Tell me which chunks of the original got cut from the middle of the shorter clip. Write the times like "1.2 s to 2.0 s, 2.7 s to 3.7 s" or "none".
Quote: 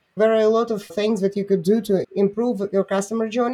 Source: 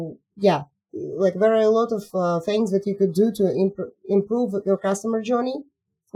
2.1 s to 2.4 s, 3.5 s to 4.0 s